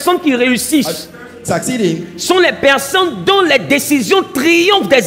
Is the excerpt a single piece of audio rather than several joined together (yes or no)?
yes